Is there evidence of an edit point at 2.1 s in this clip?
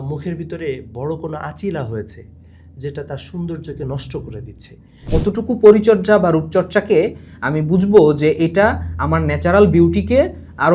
no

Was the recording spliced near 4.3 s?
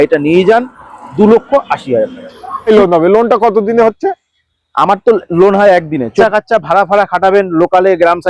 no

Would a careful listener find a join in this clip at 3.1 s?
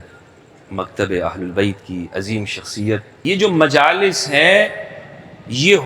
yes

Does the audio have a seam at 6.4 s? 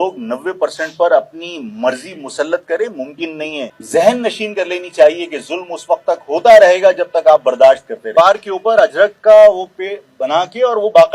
no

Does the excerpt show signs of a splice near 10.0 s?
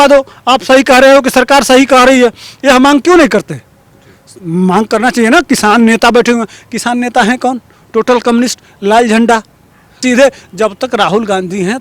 yes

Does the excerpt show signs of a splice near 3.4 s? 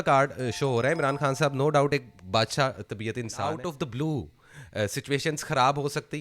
yes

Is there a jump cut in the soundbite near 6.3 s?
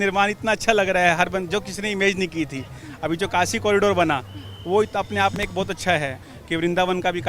yes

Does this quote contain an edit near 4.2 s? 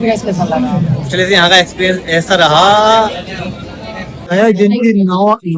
yes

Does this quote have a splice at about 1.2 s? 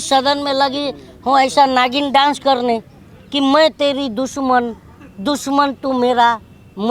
no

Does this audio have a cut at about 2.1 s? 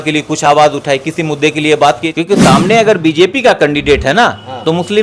yes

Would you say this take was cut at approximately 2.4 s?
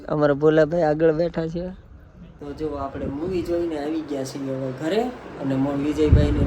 yes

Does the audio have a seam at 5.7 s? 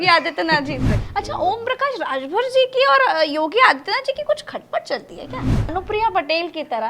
yes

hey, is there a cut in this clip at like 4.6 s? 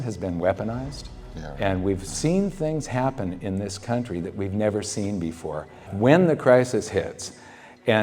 no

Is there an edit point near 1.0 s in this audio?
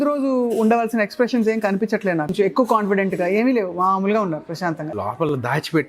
no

